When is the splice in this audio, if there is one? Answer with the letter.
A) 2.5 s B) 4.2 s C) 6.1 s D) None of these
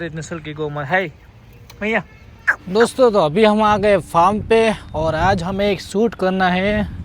A